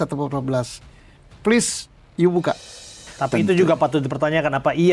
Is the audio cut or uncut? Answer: cut